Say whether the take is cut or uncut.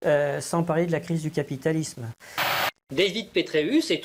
cut